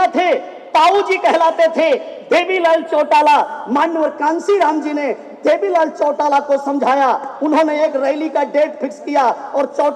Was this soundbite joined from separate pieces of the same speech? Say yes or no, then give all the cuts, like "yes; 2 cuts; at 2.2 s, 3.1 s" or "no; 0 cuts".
no; 0 cuts